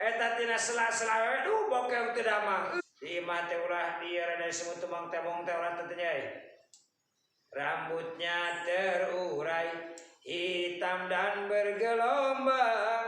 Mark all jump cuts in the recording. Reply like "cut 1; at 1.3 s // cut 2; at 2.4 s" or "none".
cut 1; at 2.8 s